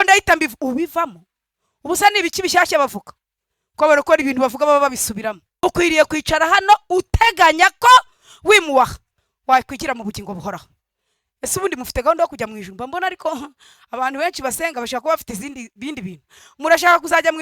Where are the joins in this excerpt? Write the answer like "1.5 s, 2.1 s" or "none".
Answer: 5.5 s